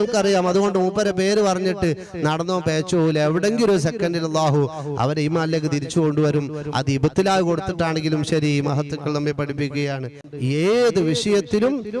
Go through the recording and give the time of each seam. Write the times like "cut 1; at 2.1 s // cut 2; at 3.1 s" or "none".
cut 1; at 10.2 s